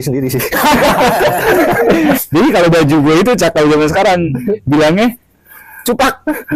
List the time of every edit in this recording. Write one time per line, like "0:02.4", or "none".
0:01.8